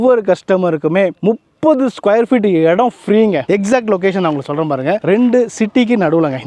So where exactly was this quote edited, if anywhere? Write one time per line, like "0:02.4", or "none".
0:03.5